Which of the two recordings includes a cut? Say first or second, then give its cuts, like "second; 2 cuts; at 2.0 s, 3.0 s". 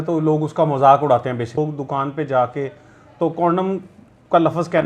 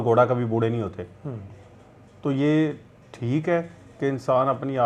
first; 1 cut; at 1.6 s